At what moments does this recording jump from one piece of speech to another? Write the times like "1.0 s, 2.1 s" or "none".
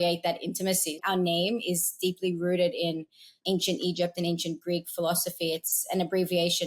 1.0 s